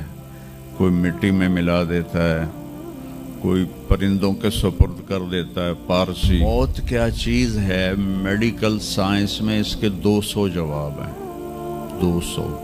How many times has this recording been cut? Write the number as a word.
one